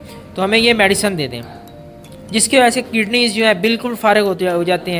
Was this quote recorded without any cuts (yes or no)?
yes